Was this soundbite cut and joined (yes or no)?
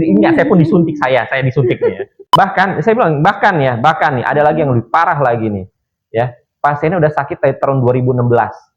yes